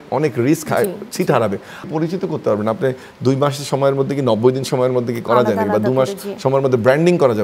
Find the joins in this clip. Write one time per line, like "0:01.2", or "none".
0:01.9